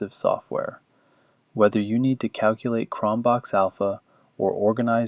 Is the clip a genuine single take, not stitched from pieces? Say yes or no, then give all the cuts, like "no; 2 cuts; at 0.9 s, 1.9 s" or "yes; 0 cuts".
yes; 0 cuts